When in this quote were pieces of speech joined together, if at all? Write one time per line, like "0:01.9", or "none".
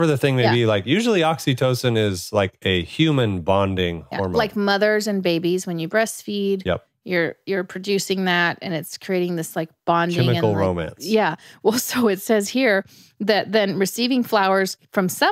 none